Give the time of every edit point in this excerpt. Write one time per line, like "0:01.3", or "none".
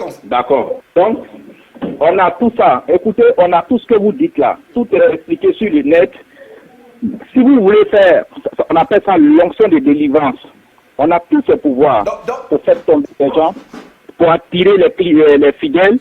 none